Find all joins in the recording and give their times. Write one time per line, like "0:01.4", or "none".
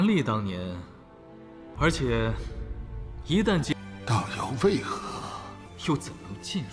0:03.9